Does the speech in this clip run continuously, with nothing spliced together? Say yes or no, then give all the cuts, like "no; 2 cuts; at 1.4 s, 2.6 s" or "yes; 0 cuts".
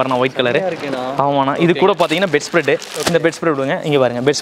yes; 0 cuts